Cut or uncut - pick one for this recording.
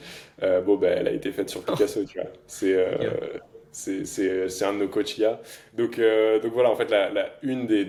uncut